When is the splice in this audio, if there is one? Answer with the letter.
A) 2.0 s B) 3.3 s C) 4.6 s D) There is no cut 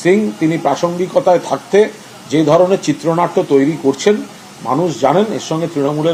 D